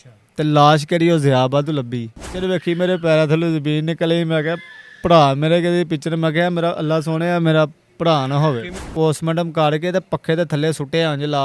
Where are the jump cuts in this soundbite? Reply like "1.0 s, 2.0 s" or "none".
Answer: 2.3 s, 8.9 s